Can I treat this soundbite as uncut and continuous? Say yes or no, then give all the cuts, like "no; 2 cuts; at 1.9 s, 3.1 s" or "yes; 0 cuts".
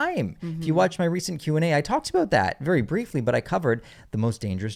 yes; 0 cuts